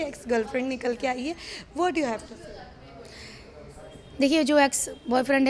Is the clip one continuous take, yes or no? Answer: yes